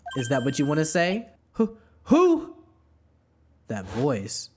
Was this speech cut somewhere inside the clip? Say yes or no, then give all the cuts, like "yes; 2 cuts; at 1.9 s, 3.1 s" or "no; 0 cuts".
yes; 1 cut; at 1.4 s